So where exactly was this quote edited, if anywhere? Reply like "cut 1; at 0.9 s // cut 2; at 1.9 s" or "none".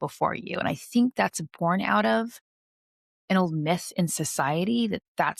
none